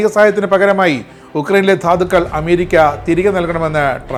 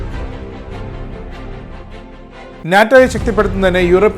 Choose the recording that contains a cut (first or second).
second